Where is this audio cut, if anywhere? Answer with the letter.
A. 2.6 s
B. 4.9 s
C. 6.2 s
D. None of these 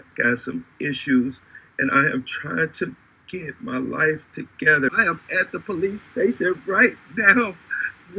B